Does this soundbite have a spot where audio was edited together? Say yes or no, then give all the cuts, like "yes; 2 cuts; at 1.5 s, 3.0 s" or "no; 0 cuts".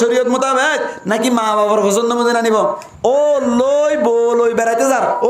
yes; 1 cut; at 2.9 s